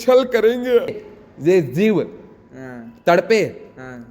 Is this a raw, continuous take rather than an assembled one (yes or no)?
no